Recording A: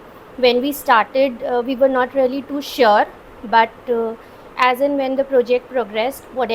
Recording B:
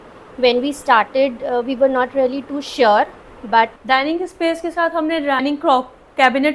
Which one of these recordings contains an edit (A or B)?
B